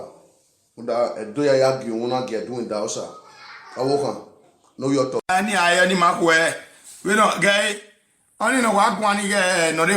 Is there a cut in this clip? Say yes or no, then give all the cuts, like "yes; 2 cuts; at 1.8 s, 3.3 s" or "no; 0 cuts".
yes; 1 cut; at 5.2 s